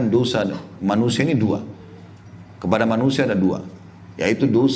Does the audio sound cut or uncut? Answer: uncut